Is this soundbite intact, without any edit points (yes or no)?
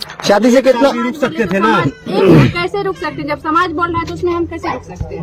yes